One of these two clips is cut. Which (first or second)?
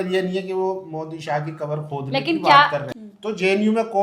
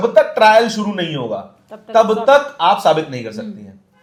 first